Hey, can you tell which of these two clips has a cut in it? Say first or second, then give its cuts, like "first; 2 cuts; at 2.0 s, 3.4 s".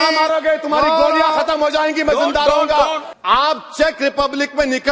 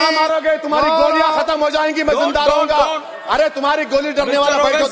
first; 1 cut; at 3.1 s